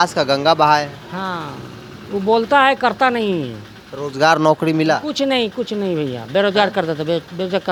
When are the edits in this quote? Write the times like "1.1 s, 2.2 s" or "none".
none